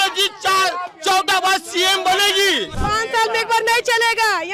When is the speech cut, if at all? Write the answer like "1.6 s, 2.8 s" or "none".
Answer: 2.7 s

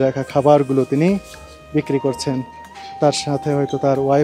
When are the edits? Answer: none

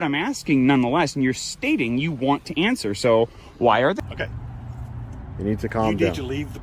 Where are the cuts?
4.0 s

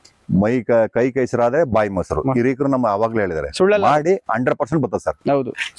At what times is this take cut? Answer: none

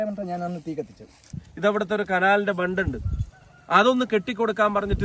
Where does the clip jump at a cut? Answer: 1.2 s

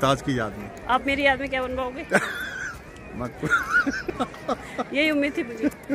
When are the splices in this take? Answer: 4.0 s

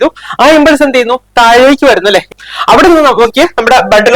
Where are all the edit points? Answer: 2.4 s

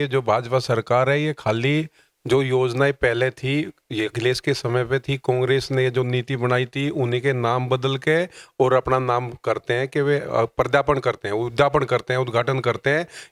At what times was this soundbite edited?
none

